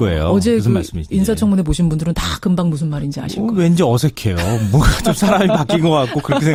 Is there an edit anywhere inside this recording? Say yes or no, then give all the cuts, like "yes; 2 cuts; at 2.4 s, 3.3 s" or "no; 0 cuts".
no; 0 cuts